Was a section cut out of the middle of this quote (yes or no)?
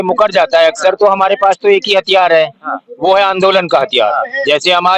no